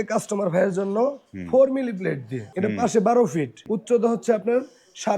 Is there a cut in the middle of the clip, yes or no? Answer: yes